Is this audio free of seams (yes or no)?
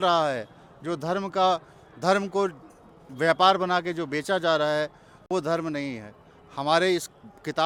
yes